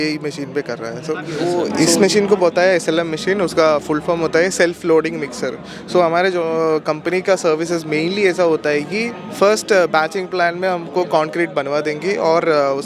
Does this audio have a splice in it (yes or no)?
yes